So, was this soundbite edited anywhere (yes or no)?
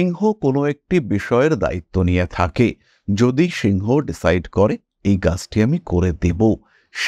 no